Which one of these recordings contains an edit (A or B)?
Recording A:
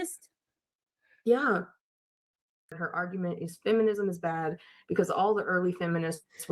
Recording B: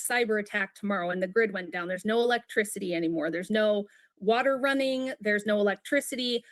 A